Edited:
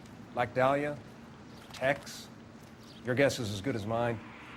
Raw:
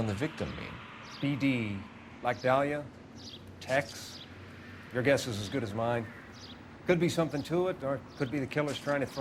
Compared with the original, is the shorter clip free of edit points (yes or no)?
yes